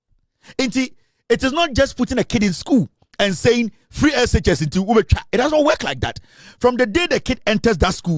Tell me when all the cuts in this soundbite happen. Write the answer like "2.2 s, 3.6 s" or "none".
none

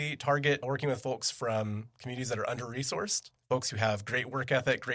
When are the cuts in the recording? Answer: 3.3 s

